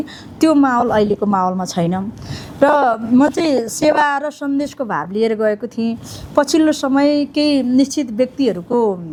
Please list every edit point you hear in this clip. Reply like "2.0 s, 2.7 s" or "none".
none